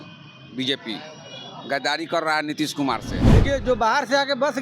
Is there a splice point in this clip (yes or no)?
yes